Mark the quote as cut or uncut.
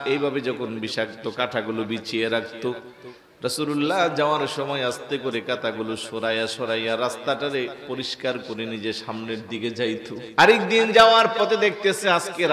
cut